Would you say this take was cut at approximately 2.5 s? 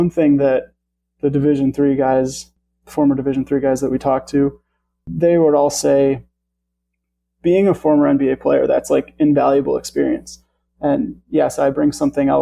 yes; 2 cuts; at 2.5 s, 5.1 s

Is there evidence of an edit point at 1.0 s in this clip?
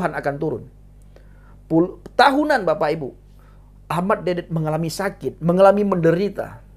no; 0 cuts

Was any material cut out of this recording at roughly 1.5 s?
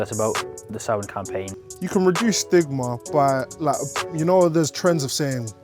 yes; 1 cut; at 1.5 s

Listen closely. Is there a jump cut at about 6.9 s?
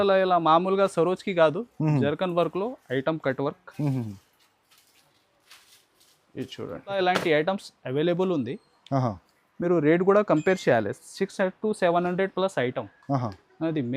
yes; 1 cut; at 6.9 s

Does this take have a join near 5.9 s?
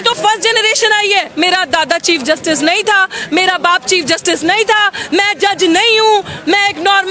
no; 1 cut; at 1.3 s

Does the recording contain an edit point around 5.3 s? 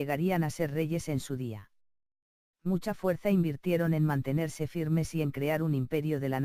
yes; 1 cut; at 5.3 s

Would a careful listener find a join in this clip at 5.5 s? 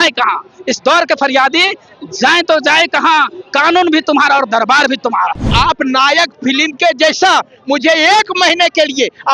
yes; 1 cut; at 5.5 s

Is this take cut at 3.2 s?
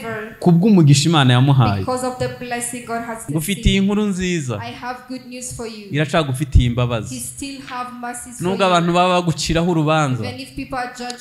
yes; 1 cut; at 3.2 s

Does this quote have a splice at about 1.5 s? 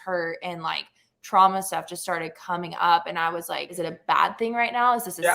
no; 1 cut; at 3.7 s

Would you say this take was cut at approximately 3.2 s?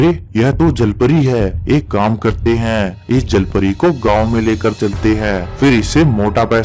no; 0 cuts

